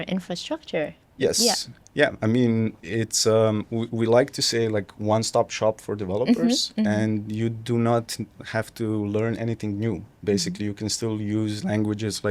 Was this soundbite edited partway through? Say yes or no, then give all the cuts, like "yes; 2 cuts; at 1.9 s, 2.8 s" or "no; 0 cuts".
yes; 1 cut; at 1.0 s